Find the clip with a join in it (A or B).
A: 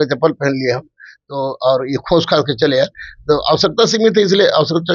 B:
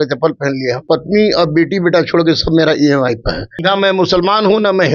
B